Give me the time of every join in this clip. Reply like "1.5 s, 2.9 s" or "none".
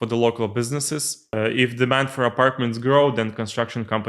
1.2 s